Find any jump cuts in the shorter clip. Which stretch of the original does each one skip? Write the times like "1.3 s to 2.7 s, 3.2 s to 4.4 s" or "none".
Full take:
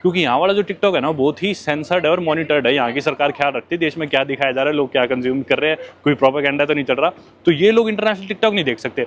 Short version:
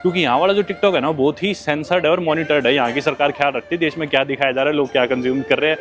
none